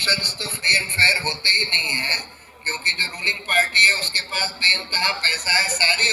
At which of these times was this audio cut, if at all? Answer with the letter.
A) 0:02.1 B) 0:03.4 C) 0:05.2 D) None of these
D